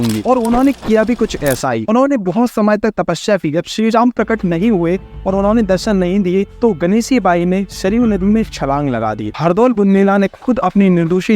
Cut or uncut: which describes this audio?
cut